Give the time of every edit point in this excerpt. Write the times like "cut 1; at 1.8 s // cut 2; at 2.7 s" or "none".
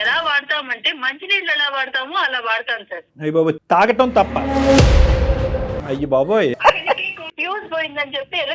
cut 1; at 5.7 s // cut 2; at 7.2 s